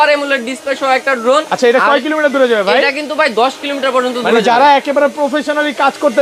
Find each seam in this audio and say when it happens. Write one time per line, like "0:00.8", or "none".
none